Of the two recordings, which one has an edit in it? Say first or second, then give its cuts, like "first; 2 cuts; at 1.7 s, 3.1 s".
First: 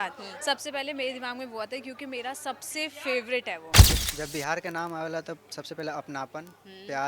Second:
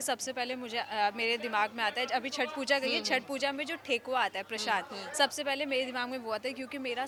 first; 1 cut; at 3.8 s